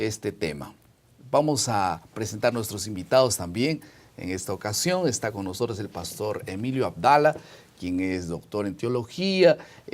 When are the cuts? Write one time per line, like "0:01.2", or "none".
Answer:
none